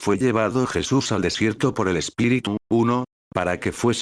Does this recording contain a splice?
no; 0 cuts

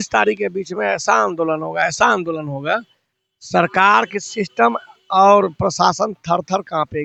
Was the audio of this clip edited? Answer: no; 0 cuts

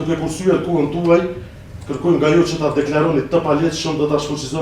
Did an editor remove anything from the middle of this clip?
no; 0 cuts

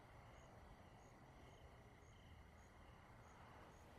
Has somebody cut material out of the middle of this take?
yes; 1 cut; at 1.3 s

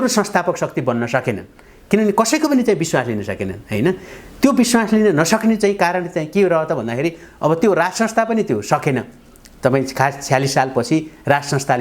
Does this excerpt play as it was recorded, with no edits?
yes; 0 cuts

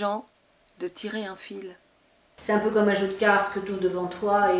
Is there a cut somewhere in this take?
yes; 1 cut; at 2.3 s

